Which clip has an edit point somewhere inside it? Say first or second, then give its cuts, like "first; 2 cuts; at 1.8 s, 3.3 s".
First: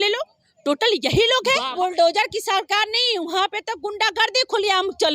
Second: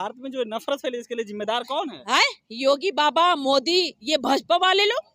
first; 1 cut; at 1.7 s